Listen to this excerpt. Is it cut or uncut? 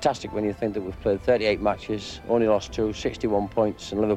uncut